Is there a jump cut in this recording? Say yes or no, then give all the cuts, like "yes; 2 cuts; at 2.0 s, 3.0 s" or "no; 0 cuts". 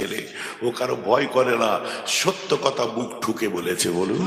no; 0 cuts